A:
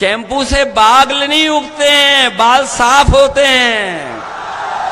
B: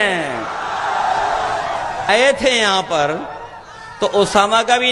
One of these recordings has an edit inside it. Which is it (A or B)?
B